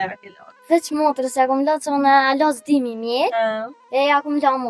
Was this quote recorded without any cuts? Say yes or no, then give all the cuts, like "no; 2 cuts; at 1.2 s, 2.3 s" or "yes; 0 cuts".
no; 1 cut; at 3.7 s